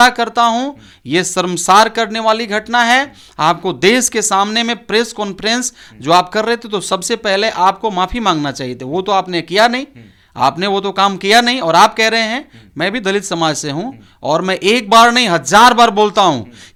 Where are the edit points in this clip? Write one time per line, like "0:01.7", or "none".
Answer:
none